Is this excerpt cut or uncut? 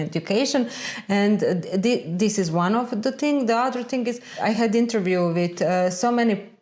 cut